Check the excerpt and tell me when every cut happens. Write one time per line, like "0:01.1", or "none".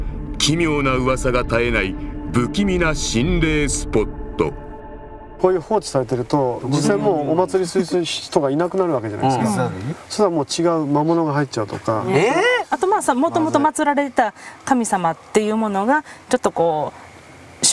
none